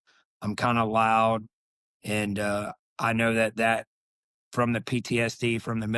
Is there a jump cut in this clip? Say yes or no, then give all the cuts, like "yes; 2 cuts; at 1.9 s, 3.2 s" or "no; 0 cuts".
no; 0 cuts